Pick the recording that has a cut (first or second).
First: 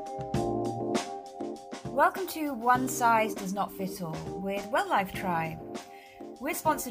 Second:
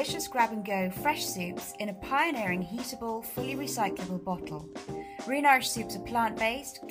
first